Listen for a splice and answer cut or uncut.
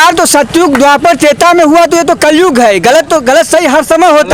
uncut